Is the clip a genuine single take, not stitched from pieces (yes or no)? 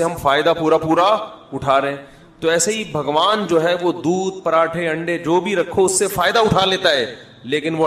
yes